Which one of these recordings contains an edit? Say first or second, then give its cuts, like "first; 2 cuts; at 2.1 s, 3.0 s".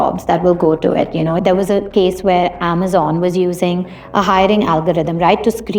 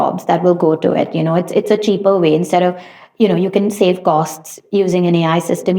first; 1 cut; at 1.4 s